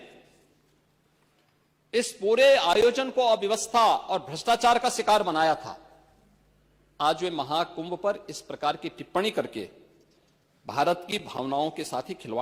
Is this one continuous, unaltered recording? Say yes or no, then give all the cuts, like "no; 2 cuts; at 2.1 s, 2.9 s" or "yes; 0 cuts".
yes; 0 cuts